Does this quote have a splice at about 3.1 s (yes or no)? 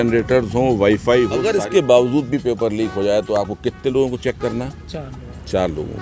no